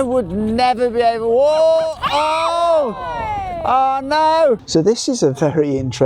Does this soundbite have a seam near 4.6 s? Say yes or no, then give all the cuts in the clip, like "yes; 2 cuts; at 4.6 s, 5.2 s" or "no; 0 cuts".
yes; 1 cut; at 4.6 s